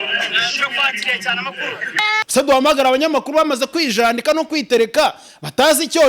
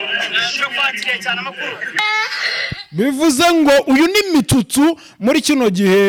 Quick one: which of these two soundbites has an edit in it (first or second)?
first